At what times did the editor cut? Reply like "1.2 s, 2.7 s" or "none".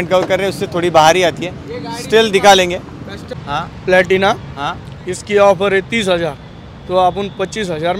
3.4 s